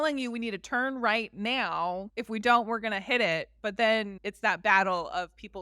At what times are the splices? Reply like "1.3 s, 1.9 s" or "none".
2.1 s, 4.2 s